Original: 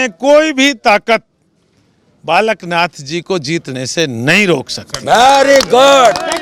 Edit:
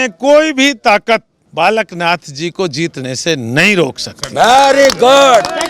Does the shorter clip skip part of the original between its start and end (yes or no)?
yes